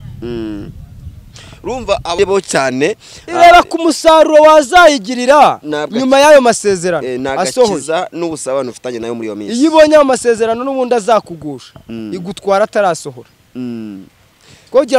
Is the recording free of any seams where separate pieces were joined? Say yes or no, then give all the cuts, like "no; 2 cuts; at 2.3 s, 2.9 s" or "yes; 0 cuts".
no; 1 cut; at 2.2 s